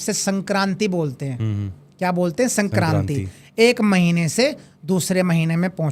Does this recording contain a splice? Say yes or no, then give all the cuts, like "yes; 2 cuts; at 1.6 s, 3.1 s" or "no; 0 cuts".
no; 0 cuts